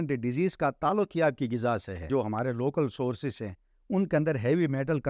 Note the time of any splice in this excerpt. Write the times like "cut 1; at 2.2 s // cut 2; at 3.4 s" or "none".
cut 1; at 2.1 s